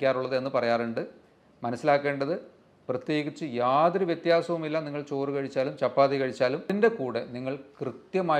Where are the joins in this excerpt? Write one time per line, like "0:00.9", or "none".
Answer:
0:06.7